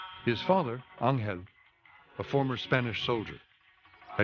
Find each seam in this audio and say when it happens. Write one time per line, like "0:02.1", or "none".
0:02.0